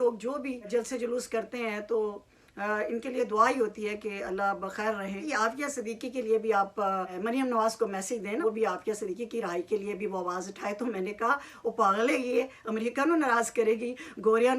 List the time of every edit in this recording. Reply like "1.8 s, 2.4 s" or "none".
5.3 s, 7.1 s, 8.4 s